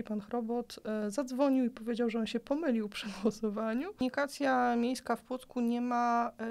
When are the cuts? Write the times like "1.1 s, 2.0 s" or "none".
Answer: 4.0 s